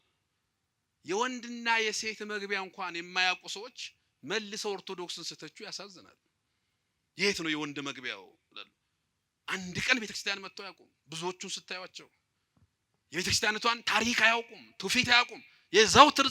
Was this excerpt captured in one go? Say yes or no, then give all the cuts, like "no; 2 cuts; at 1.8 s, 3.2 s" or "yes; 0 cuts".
yes; 0 cuts